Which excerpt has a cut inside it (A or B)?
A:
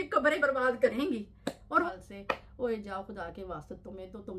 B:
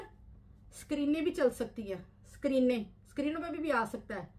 A